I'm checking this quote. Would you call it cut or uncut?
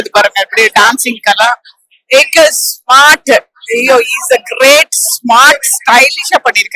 uncut